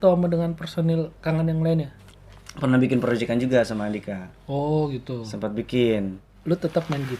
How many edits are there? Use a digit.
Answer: 2